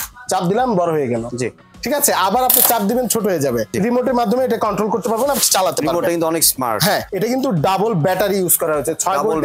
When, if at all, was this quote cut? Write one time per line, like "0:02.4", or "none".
0:03.7
0:07.1

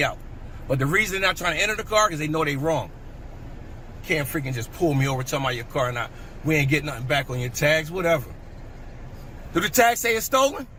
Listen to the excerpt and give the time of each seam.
none

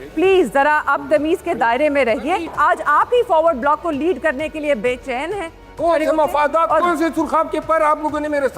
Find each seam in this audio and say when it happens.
0:02.5
0:05.8

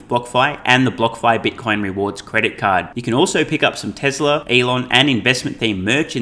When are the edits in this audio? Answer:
0:04.4

